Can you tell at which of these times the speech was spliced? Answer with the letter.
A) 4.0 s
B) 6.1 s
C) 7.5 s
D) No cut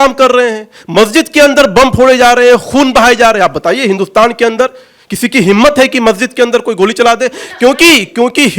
D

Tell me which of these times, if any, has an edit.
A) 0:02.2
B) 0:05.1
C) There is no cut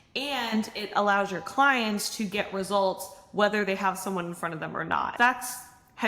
B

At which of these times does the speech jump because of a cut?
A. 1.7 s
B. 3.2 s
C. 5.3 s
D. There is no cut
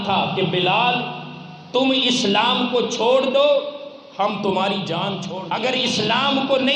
C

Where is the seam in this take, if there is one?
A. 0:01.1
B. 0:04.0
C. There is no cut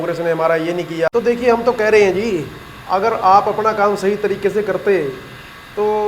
A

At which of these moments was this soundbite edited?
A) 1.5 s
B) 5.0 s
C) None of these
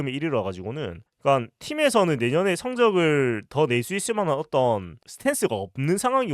B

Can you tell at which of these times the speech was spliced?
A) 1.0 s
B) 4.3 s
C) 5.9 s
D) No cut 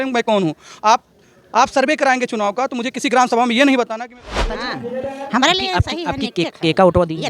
B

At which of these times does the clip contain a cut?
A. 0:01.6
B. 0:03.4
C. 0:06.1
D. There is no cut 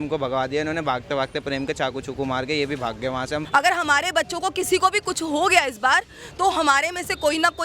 B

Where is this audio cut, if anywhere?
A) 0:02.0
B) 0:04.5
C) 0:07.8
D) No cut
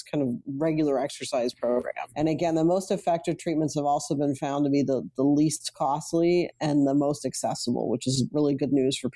A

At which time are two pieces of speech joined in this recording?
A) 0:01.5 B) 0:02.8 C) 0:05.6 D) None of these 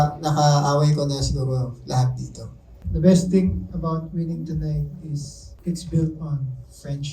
B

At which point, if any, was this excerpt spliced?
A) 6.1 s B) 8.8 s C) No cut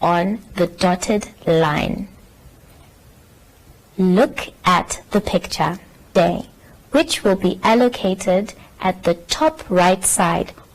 A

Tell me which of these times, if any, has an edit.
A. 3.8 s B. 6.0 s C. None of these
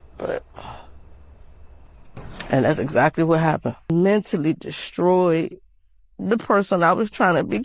A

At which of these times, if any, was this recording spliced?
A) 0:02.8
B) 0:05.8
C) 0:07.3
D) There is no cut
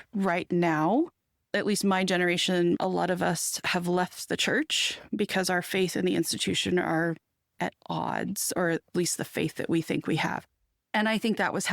A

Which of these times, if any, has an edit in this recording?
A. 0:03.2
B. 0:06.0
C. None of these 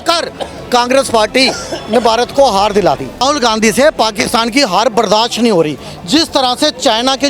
A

